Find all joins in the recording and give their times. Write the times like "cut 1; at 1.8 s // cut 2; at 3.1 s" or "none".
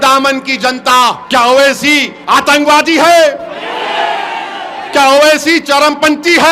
cut 1; at 1.2 s // cut 2; at 2.1 s